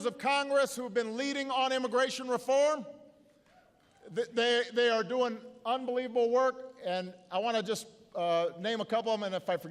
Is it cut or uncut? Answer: cut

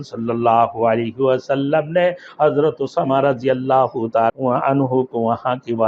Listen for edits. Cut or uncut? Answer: cut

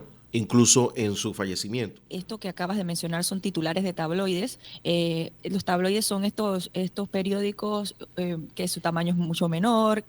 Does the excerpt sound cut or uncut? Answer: cut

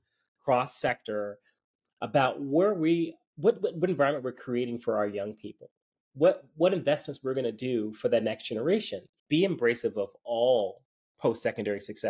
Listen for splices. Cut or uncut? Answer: cut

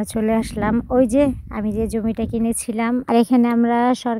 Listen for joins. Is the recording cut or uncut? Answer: cut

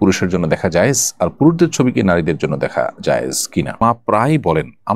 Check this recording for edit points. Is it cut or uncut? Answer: cut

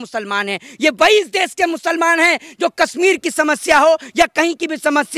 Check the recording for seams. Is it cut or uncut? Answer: uncut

